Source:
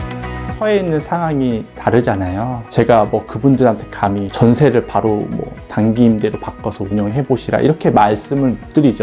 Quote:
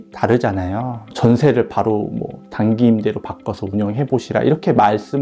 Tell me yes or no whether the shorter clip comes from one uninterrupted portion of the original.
no